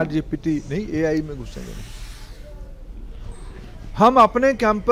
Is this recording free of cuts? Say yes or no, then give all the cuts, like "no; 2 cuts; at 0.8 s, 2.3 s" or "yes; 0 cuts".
yes; 0 cuts